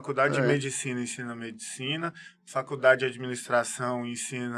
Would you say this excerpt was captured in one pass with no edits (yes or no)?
yes